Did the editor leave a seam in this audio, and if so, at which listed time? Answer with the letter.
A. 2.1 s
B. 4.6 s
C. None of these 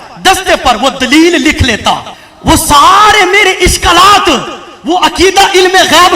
A